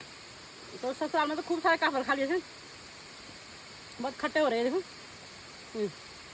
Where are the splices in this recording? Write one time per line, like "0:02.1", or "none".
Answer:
none